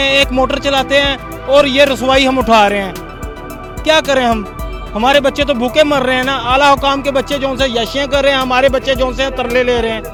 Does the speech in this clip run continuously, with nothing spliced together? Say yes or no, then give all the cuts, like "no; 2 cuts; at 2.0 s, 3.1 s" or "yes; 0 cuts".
yes; 0 cuts